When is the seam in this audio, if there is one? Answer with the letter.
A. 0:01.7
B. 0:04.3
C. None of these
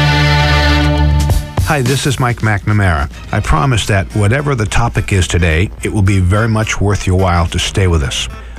A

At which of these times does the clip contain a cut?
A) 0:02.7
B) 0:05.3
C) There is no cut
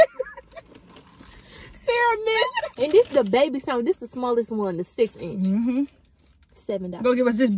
A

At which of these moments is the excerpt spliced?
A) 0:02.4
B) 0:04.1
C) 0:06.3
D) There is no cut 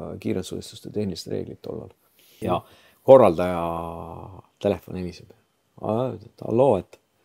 A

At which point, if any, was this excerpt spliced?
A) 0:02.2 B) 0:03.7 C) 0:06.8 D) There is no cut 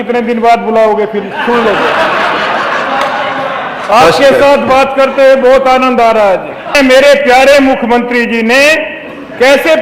C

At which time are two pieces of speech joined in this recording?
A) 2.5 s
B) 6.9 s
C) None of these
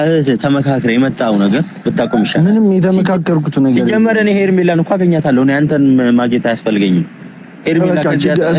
B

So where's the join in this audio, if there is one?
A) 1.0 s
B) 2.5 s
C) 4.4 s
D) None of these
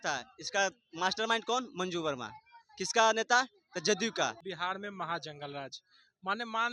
C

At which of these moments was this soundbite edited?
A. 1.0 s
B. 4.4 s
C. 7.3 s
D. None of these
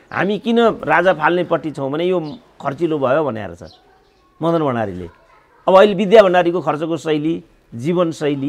D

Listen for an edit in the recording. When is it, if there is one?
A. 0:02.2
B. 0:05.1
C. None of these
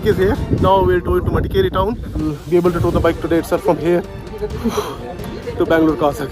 A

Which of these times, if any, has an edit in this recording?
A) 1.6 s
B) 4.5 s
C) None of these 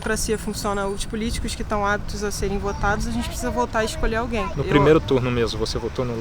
B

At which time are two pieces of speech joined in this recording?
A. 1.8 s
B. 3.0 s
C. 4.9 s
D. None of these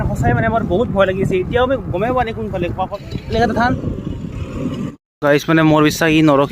B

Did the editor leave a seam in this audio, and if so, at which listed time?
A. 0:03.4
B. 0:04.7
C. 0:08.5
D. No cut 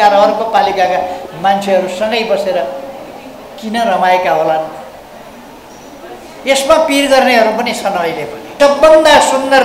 C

